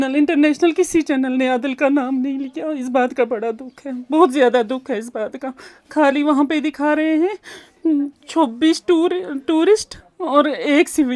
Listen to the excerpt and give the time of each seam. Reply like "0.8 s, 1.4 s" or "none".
none